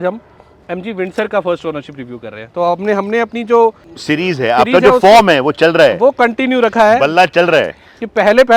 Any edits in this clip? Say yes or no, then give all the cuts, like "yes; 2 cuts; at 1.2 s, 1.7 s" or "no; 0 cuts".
yes; 1 cut; at 3.9 s